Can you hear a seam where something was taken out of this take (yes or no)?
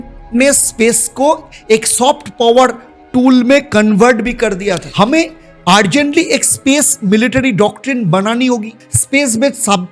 yes